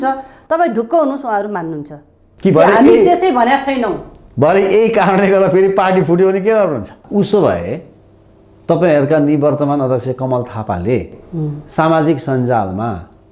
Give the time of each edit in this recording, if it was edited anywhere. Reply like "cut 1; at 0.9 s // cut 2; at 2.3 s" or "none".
cut 1; at 7.0 s